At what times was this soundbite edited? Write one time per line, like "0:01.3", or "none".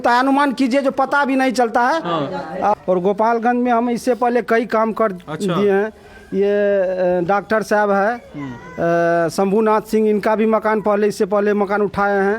0:02.7